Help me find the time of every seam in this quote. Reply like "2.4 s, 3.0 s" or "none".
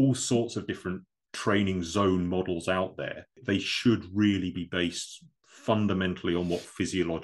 3.4 s